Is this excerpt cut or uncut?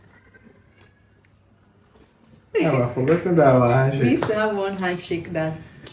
uncut